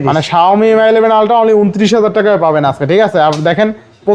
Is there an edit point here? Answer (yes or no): no